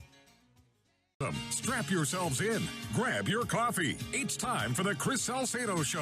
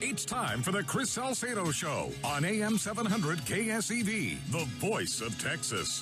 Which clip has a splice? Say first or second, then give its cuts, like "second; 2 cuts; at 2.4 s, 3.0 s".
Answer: first; 1 cut; at 1.2 s